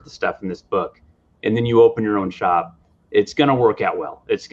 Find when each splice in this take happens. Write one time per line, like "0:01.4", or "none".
none